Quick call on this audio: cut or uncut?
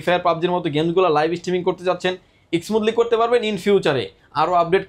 uncut